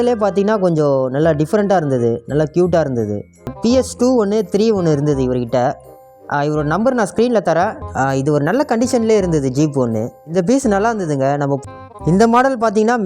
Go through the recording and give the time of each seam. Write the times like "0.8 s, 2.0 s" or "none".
3.6 s, 7.8 s, 11.6 s